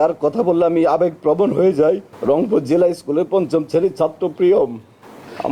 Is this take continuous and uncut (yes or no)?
yes